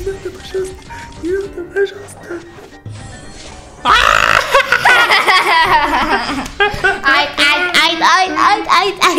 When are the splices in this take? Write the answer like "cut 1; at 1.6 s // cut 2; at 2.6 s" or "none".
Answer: none